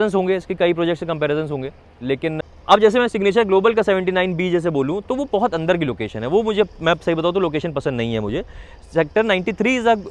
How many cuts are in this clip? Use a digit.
1